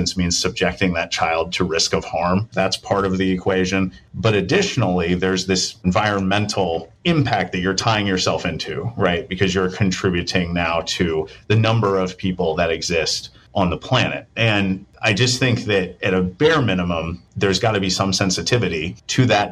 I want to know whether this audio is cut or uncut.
uncut